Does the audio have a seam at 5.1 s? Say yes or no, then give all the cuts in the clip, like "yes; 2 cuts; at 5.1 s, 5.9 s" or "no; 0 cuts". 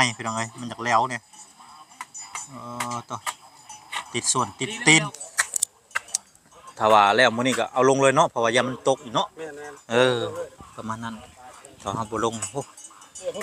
yes; 1 cut; at 5.1 s